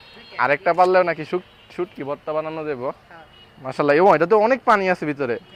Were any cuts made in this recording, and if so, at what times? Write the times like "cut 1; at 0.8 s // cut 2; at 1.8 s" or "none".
none